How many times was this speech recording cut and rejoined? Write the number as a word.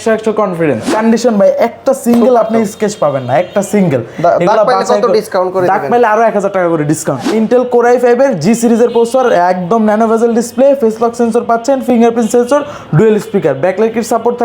two